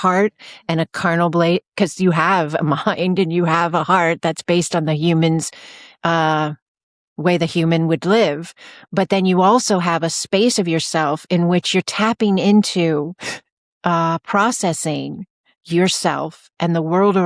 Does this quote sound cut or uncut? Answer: uncut